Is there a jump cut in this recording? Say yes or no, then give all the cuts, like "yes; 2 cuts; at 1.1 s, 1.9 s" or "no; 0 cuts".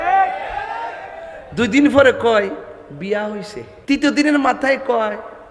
yes; 1 cut; at 3.7 s